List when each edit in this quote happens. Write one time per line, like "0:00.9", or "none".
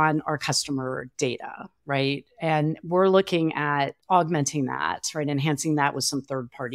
0:01.1

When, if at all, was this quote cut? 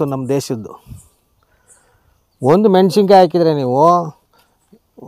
none

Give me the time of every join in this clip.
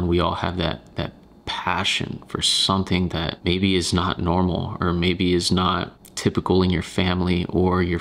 none

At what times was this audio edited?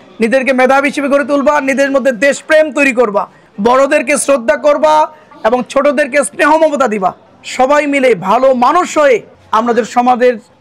0:05.2

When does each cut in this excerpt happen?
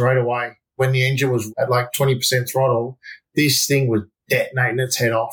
0:01.1

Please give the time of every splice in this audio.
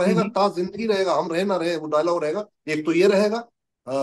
none

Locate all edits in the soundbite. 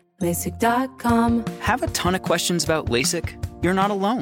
0:01.1

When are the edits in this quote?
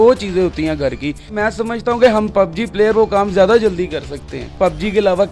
0:01.3
0:04.5

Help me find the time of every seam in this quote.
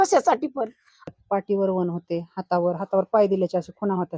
0:01.0

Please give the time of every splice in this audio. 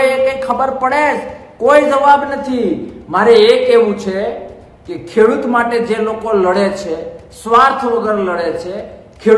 none

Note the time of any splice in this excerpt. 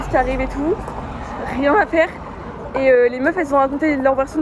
none

